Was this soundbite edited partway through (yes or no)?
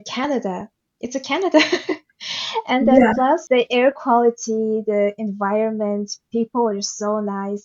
yes